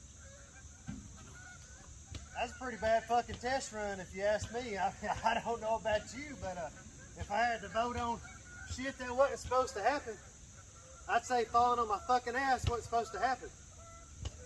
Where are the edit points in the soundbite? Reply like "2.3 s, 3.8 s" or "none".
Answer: none